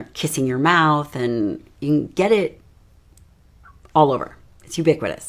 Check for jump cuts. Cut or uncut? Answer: uncut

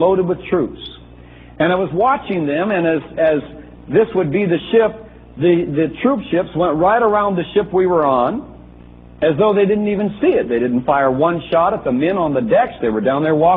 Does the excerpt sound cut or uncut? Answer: cut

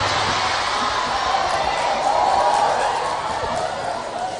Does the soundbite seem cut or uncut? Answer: uncut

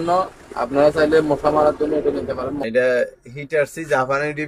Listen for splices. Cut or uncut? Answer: cut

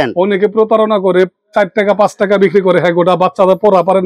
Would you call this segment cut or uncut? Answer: uncut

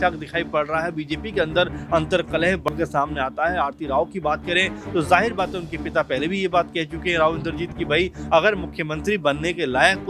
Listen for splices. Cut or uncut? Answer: cut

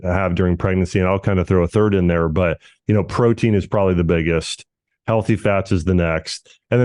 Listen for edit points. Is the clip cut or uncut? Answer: uncut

